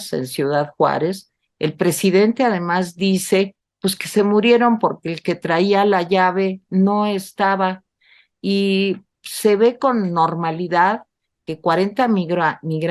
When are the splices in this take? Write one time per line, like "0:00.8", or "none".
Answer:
none